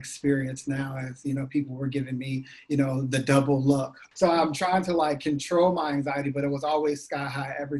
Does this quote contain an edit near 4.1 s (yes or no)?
yes